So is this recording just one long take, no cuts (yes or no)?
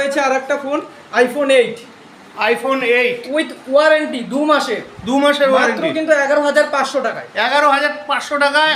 yes